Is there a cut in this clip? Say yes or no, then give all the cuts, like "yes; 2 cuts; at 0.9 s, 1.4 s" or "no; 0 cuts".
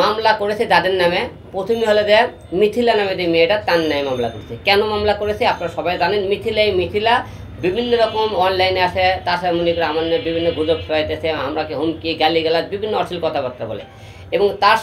no; 0 cuts